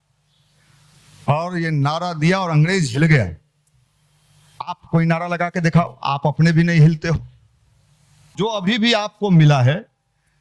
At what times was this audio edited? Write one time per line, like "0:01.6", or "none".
0:08.4

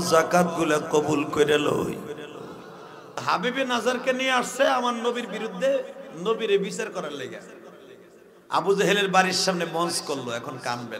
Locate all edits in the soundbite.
0:03.2

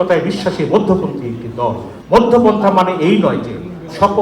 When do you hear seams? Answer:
0:01.9

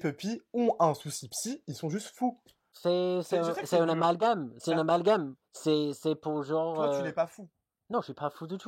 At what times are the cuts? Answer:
none

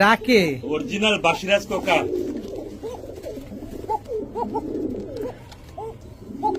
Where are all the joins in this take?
none

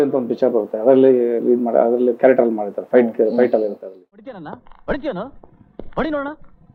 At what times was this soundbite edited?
none

